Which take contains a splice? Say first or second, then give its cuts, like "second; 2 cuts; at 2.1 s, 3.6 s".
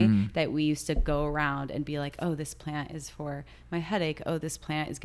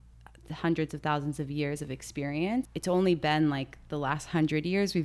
second; 1 cut; at 2.7 s